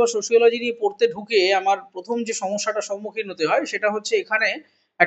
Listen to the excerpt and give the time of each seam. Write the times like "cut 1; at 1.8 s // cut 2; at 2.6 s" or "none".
none

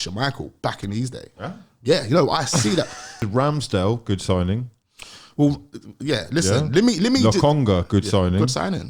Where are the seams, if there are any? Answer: cut 1; at 3.2 s

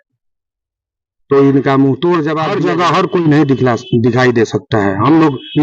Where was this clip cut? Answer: cut 1; at 2.4 s

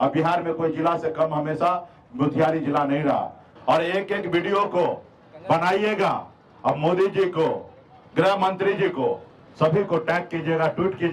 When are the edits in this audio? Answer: cut 1; at 3.4 s

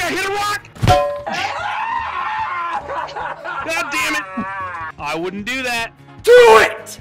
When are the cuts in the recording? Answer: cut 1; at 4.9 s

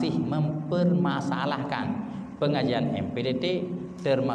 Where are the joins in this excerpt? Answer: none

